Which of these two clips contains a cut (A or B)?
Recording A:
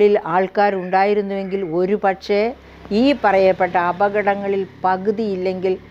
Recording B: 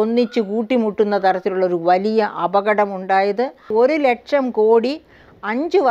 B